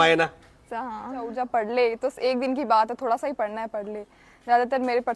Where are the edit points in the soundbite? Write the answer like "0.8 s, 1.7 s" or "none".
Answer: 1.3 s

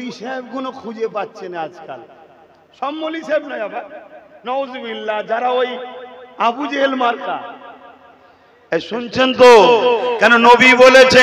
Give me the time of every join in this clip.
none

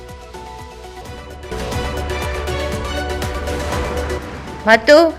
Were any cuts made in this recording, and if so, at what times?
4.2 s

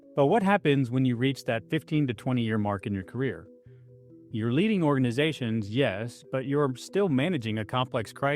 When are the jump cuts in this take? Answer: 6.1 s

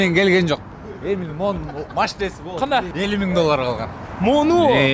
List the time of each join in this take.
2.9 s

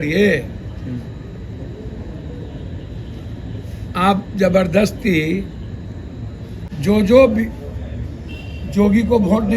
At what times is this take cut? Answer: 6.7 s

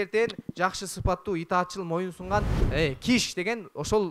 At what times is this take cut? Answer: 2.6 s

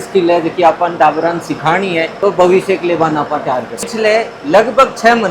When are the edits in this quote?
3.8 s

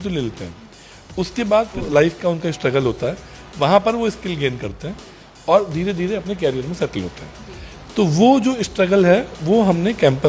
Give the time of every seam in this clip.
1.9 s

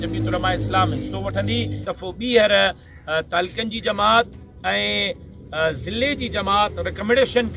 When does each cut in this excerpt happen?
1.8 s

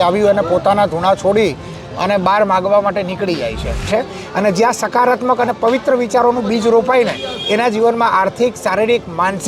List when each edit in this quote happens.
3.9 s

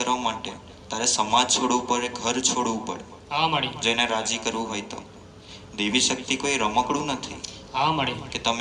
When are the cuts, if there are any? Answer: none

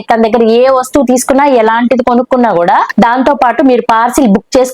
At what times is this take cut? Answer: 2.9 s

